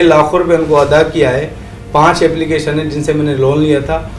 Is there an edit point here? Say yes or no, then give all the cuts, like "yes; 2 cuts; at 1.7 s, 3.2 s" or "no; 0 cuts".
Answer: no; 0 cuts